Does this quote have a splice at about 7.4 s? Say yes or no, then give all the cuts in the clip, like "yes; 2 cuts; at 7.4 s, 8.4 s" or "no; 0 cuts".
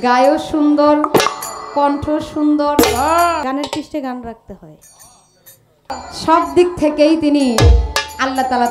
no; 2 cuts; at 3.4 s, 5.9 s